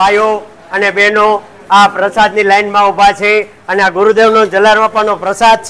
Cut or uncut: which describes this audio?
uncut